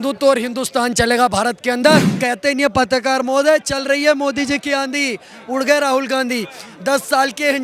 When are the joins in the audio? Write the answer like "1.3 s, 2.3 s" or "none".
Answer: 2.1 s